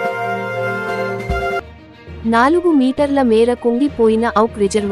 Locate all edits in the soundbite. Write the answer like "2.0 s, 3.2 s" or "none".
1.6 s